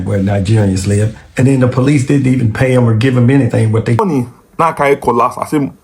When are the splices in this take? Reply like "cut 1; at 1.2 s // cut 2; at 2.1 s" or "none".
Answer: cut 1; at 4.0 s